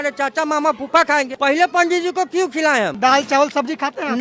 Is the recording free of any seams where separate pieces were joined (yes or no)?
no